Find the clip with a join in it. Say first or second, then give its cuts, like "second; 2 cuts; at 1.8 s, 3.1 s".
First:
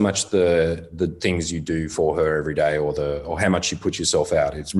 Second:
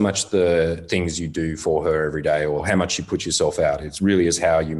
second; 2 cuts; at 0.8 s, 2.6 s